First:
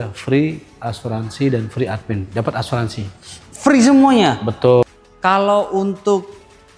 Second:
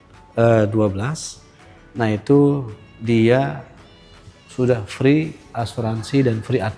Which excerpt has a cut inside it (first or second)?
first